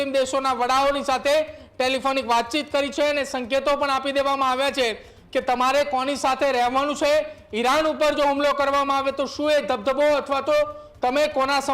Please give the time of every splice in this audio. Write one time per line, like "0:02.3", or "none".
none